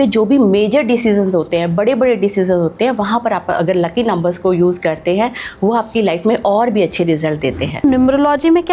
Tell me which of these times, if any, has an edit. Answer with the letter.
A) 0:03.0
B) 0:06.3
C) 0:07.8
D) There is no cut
C